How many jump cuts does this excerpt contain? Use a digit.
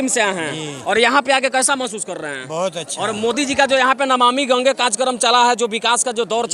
0